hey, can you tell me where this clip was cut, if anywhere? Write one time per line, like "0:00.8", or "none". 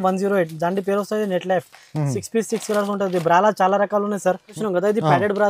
0:04.5